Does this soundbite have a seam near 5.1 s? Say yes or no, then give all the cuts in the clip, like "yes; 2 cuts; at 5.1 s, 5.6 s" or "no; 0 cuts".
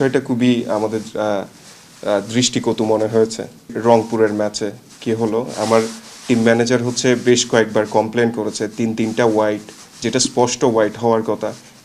no; 1 cut; at 3.7 s